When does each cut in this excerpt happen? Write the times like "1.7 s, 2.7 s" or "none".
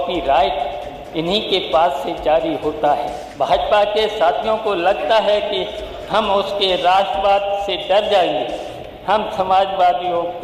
3.2 s